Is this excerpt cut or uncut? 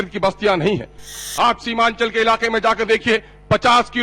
cut